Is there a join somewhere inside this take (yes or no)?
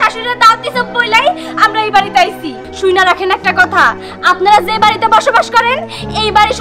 yes